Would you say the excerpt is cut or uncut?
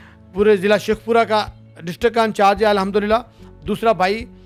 uncut